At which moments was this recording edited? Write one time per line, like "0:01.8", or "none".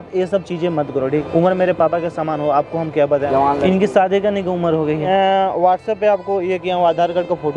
0:01.1
0:03.3
0:05.1